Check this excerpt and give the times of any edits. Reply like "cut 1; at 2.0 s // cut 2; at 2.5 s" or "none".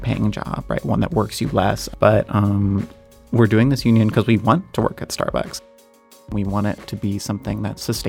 cut 1; at 1.9 s // cut 2; at 6.0 s